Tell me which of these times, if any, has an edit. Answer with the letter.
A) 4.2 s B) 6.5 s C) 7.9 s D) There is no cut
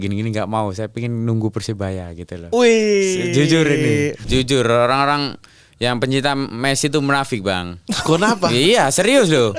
A